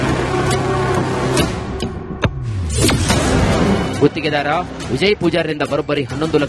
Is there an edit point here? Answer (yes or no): yes